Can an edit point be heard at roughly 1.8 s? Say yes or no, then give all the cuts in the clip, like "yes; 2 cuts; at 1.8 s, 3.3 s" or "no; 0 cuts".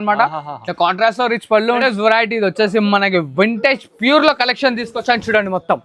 yes; 1 cut; at 1.8 s